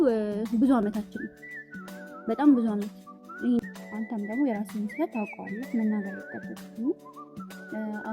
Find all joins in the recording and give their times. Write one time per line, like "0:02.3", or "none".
0:03.6